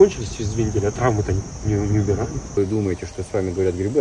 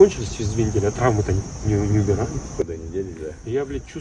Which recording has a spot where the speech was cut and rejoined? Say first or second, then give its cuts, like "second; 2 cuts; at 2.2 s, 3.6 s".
first; 1 cut; at 2.5 s